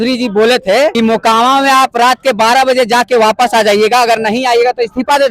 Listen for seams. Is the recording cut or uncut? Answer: cut